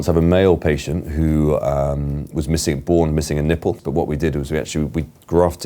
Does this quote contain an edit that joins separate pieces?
yes; 1 cut; at 3.8 s

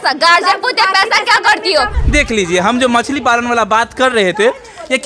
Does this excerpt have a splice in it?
yes; 1 cut; at 2.0 s

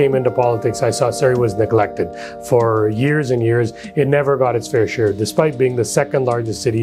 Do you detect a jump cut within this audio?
no; 0 cuts

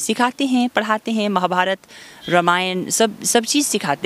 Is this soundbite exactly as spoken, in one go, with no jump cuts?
yes; 0 cuts

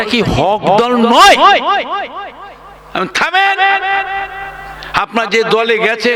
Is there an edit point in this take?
no; 0 cuts

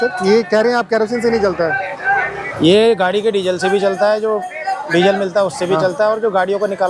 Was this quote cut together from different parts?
no; 0 cuts

